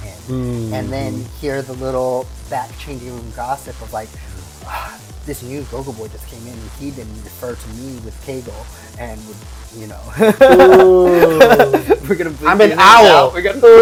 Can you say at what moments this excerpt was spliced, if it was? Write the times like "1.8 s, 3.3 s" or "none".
none

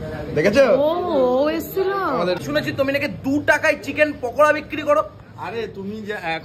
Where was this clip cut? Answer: 2.4 s

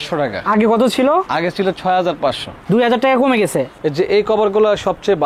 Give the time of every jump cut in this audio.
2.5 s, 3.7 s

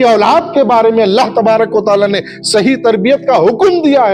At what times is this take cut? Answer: none

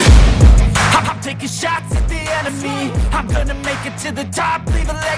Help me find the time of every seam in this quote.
1.0 s

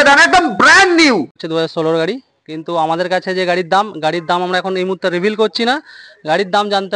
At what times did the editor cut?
1.4 s

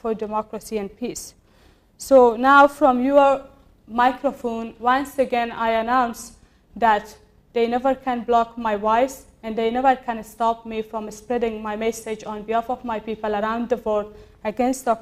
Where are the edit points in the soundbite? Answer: none

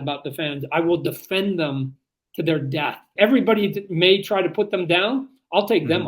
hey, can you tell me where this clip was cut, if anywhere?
3.1 s

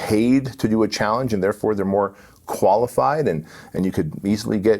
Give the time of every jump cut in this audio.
none

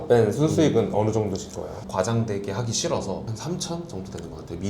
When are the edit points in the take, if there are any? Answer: 1.8 s, 3.3 s

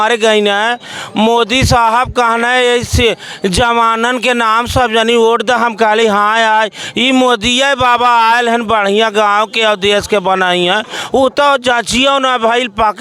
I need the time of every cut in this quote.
none

